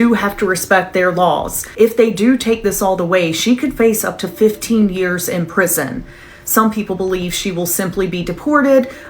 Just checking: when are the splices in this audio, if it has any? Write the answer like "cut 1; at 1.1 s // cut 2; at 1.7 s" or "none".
cut 1; at 1.6 s

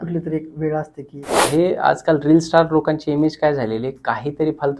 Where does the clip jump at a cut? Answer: cut 1; at 1.3 s

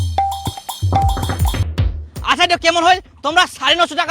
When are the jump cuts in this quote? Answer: cut 1; at 1.3 s

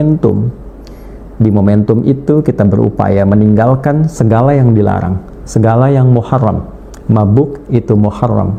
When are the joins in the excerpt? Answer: none

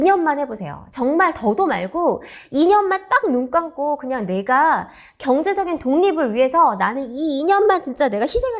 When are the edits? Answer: none

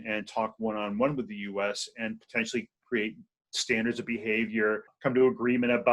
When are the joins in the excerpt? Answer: cut 1; at 4.9 s

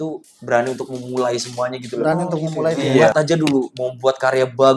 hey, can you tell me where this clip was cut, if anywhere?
cut 1; at 3.0 s

